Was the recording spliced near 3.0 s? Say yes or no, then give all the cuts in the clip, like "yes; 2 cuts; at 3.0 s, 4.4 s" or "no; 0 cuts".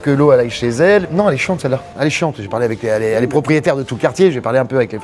no; 1 cut; at 1.1 s